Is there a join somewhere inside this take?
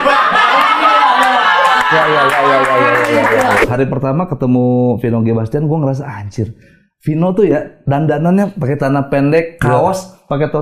yes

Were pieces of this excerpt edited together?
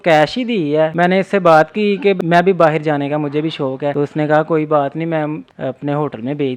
yes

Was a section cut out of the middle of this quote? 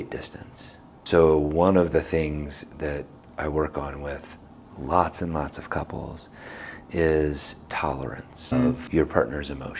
yes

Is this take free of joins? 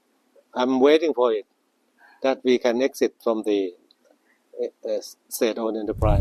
yes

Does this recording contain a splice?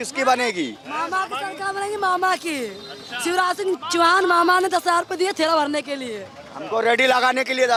no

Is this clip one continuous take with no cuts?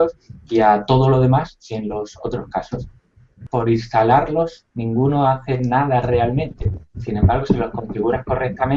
no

